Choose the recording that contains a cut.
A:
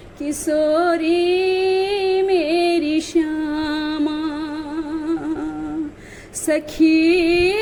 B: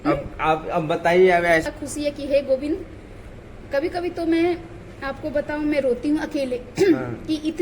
B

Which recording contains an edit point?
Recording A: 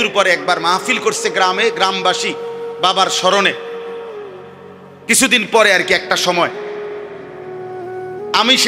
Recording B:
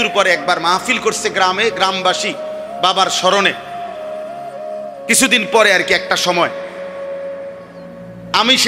B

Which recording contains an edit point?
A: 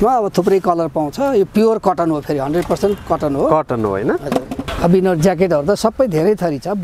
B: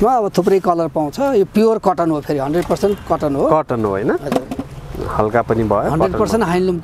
A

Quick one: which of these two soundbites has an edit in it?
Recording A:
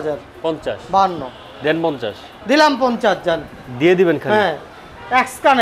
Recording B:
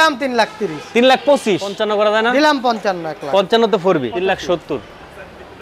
B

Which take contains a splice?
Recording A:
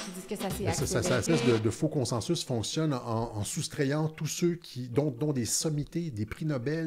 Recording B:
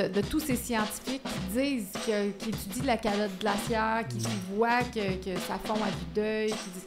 A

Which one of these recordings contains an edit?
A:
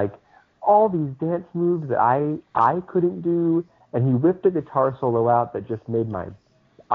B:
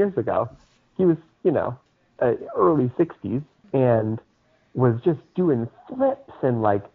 B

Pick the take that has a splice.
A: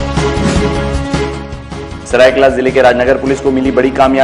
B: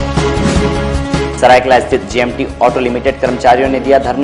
B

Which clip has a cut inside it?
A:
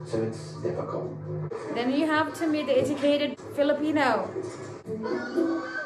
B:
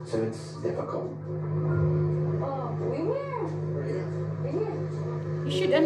A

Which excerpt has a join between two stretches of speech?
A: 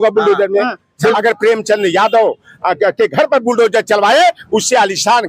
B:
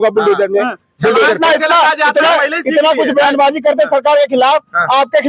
A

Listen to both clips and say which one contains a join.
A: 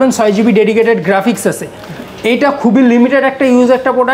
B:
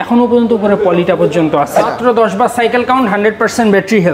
B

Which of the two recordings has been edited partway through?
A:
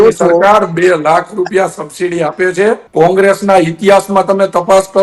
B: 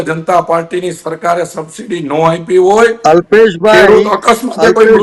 A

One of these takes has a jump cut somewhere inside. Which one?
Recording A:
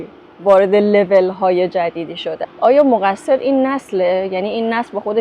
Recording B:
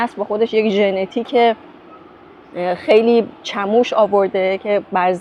A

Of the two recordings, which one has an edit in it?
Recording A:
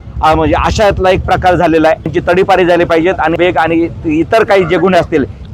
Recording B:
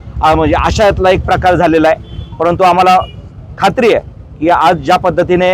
A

